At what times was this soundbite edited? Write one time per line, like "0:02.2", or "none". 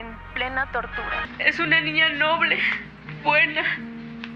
0:01.3

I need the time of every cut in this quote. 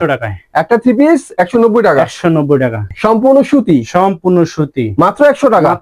0:02.9

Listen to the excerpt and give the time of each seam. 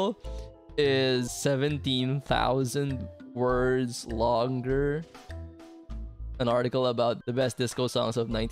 0:01.3
0:07.2

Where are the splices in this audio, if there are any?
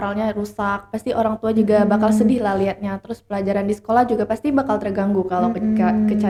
none

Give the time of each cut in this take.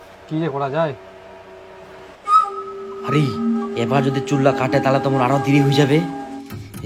none

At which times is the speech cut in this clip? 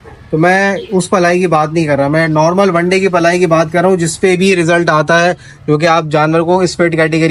none

